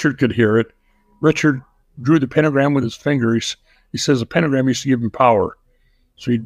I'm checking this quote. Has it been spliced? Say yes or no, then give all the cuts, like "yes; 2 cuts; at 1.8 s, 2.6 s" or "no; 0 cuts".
no; 0 cuts